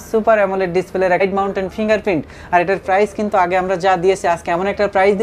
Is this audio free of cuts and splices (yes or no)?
no